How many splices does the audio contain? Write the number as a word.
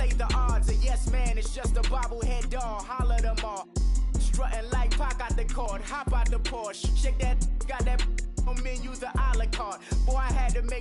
zero